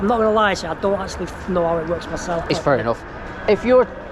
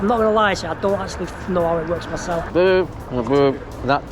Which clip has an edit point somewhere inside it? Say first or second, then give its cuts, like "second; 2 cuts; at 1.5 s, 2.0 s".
second; 1 cut; at 2.5 s